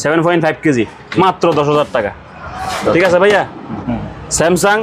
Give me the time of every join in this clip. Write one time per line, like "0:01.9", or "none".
0:03.7